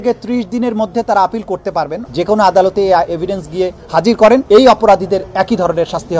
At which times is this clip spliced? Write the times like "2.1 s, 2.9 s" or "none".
2.0 s, 4.4 s